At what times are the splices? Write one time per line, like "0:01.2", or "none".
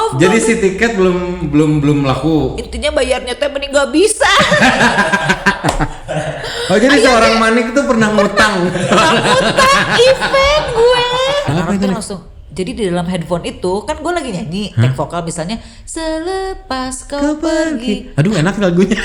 0:11.5